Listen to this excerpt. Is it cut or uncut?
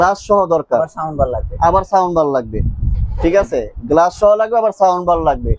uncut